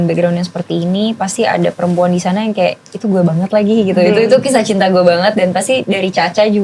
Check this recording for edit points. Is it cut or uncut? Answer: uncut